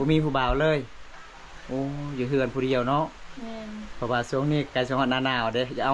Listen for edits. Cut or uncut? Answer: uncut